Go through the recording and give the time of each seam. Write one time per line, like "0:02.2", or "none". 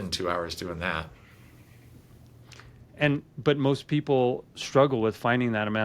none